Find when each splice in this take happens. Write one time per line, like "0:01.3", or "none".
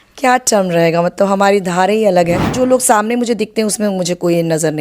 0:02.5